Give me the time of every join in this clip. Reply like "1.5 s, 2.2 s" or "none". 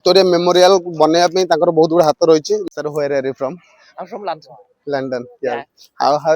2.6 s